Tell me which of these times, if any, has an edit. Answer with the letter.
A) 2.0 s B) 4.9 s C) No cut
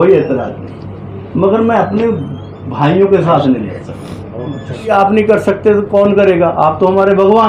B